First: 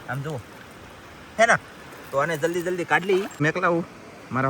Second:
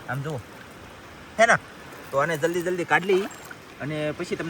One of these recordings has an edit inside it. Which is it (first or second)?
first